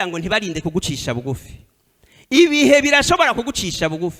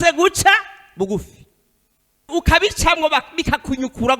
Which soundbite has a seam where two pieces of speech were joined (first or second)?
second